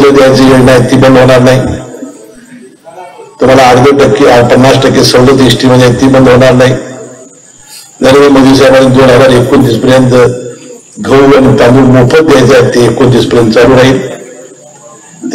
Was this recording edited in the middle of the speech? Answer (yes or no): no